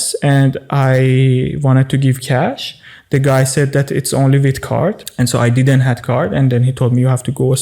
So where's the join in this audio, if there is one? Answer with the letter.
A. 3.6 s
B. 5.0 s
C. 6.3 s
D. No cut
B